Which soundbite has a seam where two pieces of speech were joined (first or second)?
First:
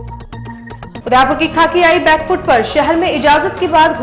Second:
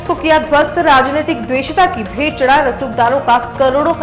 first